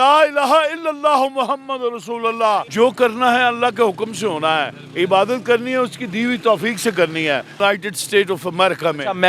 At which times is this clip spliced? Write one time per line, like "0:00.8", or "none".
0:02.7
0:07.5